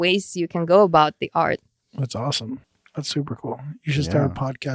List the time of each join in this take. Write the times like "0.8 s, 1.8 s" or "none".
2.8 s